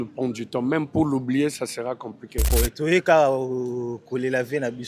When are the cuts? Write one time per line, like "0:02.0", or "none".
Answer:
0:02.5